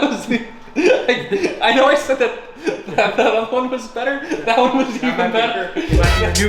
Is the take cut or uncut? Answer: uncut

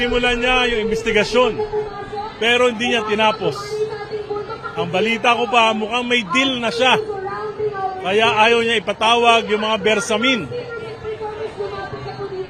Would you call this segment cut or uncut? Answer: uncut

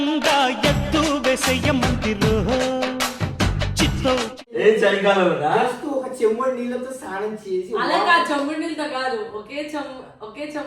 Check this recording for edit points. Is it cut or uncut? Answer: cut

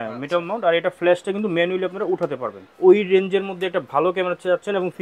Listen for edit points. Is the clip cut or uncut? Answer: cut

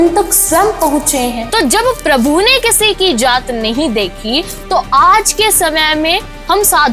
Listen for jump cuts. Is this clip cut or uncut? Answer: cut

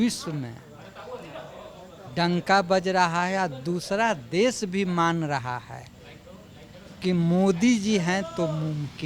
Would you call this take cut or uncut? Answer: cut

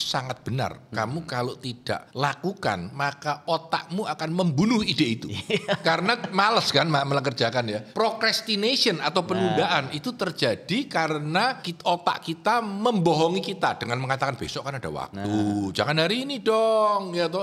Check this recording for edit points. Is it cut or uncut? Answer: cut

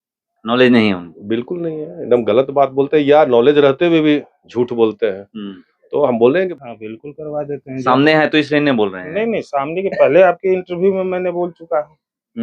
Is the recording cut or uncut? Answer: cut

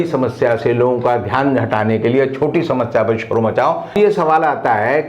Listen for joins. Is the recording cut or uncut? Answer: cut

